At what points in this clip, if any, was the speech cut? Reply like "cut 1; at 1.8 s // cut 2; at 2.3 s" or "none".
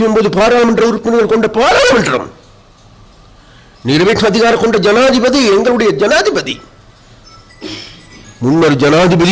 none